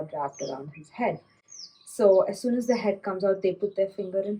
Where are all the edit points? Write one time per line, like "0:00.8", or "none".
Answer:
none

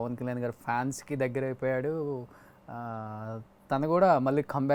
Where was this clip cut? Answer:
none

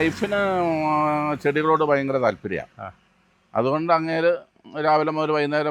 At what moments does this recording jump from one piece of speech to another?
none

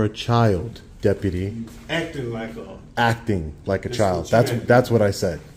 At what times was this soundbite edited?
none

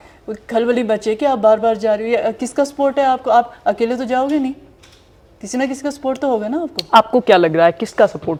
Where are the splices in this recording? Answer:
none

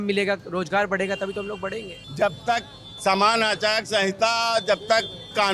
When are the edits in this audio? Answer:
0:02.0

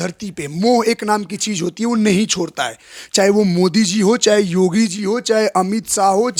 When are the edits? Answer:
none

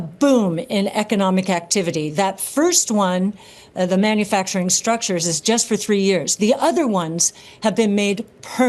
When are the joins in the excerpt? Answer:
none

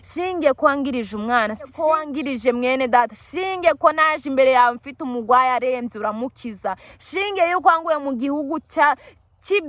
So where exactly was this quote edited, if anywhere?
0:01.7

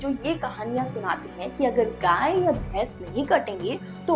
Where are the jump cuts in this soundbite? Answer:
none

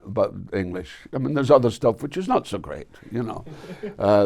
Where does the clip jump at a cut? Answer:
none

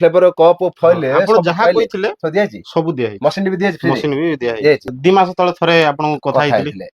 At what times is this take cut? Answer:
0:04.9

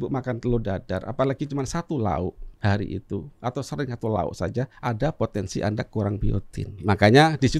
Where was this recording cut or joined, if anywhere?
0:02.5
0:03.3
0:04.7
0:06.8

